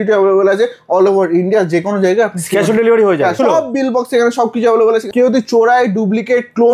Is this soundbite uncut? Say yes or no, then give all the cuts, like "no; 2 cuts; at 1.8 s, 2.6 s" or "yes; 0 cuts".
no; 2 cuts; at 3.4 s, 5.1 s